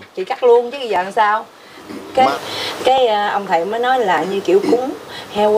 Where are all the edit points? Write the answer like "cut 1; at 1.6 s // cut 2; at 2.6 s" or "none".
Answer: cut 1; at 2.3 s